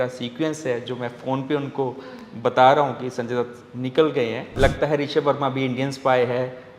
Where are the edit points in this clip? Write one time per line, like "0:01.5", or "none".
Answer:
0:04.5